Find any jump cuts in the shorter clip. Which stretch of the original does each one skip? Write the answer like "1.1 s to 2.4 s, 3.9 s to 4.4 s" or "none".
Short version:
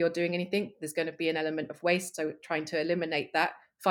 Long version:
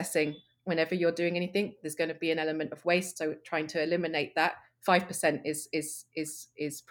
none